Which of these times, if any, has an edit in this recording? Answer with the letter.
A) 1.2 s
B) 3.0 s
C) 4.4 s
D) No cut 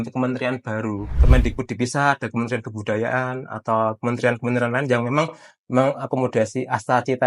A